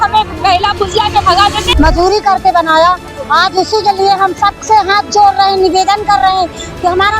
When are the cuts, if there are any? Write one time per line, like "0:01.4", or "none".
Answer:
0:01.6